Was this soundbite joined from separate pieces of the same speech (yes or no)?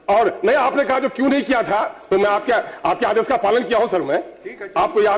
no